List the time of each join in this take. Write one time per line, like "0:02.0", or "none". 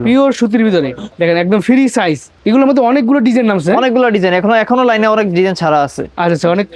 0:01.0
0:02.3